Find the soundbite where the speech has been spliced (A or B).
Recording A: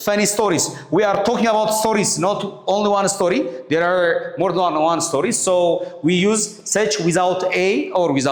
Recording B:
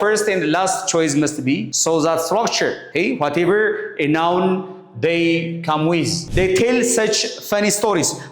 B